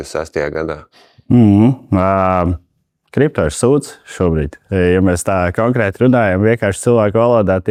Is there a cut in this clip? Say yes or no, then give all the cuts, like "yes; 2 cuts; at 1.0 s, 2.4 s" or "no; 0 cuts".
no; 0 cuts